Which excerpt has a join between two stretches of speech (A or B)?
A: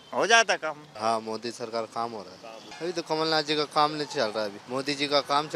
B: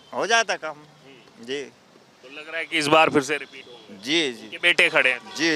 A